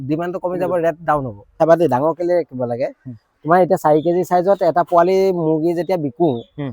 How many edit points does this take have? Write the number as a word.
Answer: one